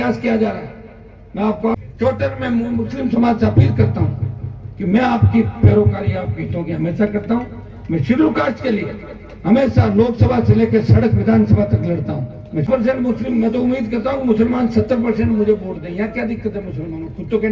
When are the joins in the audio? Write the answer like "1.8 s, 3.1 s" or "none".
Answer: 1.8 s, 12.6 s